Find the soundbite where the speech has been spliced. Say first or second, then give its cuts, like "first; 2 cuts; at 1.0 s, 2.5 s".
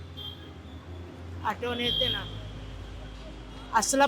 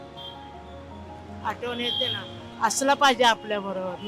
second; 1 cut; at 2.4 s